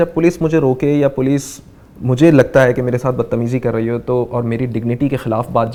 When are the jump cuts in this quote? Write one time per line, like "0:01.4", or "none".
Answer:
none